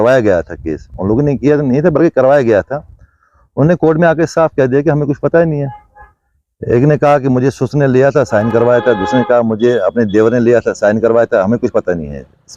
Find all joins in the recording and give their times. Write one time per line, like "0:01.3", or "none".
none